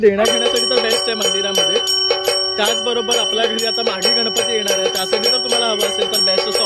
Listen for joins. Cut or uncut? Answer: uncut